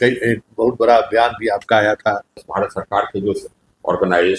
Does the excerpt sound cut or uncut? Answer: cut